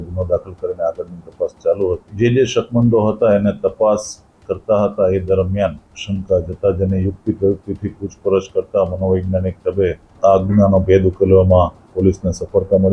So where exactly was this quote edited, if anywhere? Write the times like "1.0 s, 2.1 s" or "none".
2.1 s, 5.9 s, 10.1 s